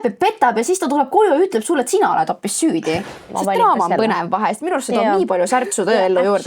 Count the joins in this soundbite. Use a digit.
1